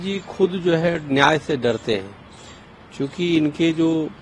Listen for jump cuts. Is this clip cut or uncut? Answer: uncut